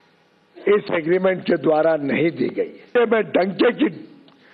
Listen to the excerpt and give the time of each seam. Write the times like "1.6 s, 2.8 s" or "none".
2.9 s